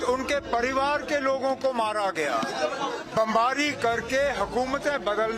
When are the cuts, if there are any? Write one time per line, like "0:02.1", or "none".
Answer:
0:02.5